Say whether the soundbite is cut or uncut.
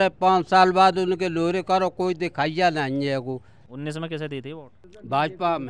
cut